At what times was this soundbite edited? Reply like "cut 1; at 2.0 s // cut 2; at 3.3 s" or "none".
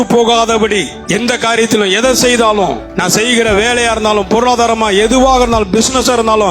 cut 1; at 0.9 s // cut 2; at 2.9 s